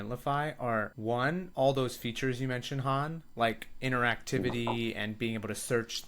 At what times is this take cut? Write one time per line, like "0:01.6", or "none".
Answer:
0:00.9